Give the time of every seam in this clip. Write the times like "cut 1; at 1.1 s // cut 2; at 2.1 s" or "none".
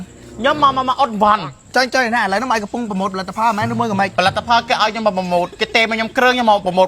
cut 1; at 1.4 s // cut 2; at 4.1 s